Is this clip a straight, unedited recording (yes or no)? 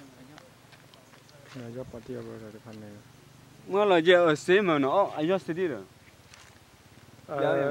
yes